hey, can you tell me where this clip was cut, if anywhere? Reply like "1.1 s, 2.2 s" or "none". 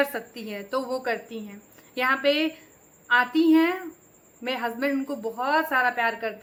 none